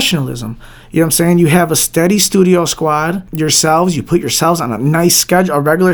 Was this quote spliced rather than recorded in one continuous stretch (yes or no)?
yes